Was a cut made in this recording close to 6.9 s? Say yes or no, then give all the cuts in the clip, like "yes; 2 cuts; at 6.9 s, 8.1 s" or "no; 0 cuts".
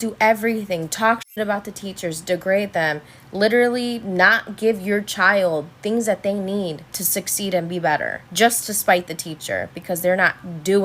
no; 0 cuts